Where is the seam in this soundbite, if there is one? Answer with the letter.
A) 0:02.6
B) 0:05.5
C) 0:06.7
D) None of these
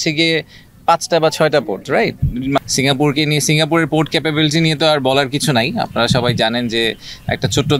A